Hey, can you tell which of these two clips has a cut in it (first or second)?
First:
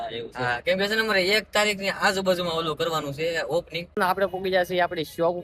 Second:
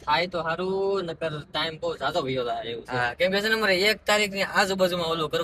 first